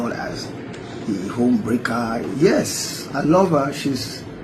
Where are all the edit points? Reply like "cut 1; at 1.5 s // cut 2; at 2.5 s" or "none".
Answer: cut 1; at 2.3 s